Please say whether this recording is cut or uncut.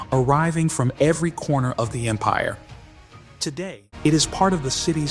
cut